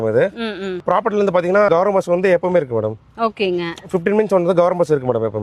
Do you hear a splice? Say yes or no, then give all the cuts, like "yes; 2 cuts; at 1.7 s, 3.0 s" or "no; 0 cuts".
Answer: no; 0 cuts